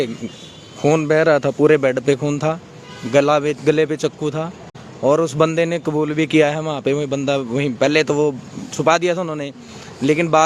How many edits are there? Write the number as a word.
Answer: zero